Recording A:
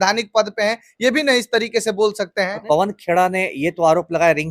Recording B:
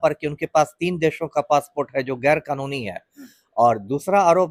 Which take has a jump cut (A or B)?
A